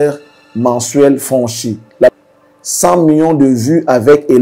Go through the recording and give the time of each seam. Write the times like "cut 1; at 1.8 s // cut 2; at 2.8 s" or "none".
cut 1; at 2.2 s